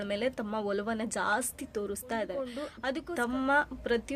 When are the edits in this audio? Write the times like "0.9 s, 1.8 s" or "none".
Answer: 2.7 s